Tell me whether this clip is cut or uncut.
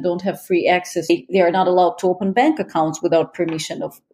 cut